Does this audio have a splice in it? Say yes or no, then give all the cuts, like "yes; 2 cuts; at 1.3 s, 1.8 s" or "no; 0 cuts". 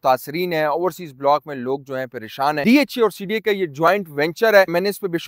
yes; 1 cut; at 2.6 s